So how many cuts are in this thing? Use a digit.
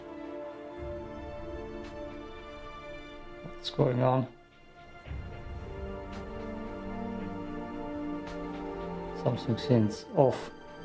0